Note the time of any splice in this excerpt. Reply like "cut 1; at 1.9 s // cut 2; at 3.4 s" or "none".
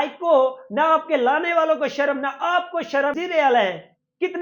cut 1; at 3.2 s